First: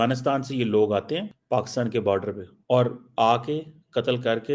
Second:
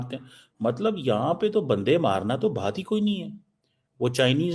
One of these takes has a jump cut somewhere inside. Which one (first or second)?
first